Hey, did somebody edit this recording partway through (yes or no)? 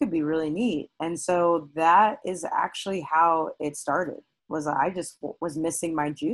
no